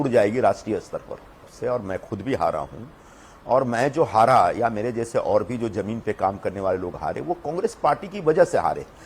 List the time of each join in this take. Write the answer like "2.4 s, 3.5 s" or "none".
1.4 s

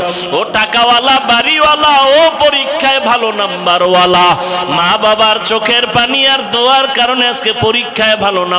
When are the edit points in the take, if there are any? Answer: none

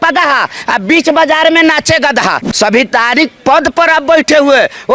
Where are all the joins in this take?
2.4 s

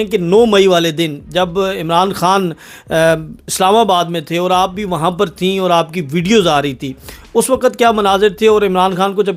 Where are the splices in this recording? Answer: none

